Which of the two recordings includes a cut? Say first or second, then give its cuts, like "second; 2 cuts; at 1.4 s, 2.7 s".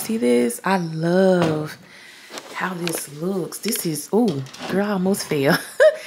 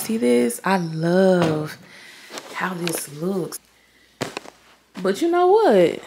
second; 1 cut; at 3.5 s